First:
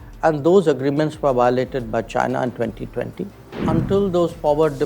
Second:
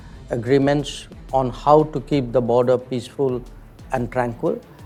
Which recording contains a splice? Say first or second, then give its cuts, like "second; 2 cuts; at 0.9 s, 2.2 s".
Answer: first; 1 cut; at 3.5 s